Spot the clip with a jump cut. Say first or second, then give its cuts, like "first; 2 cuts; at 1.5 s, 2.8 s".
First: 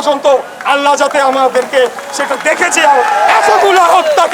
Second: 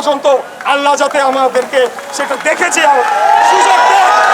first; 1 cut; at 3.3 s